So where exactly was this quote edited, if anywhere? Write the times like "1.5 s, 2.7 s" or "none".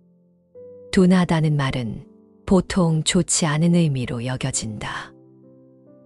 0.9 s, 5.1 s